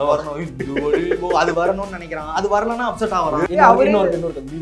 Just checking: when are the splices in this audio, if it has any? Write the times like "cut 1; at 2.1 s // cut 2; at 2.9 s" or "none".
cut 1; at 3.4 s